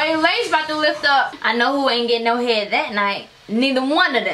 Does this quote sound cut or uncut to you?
cut